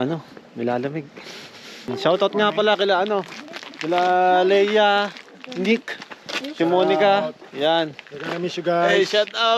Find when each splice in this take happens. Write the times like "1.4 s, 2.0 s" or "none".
1.9 s